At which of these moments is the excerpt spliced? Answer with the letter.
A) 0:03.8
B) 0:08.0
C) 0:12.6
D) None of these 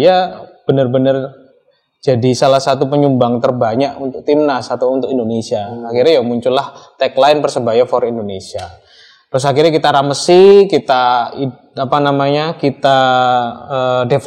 D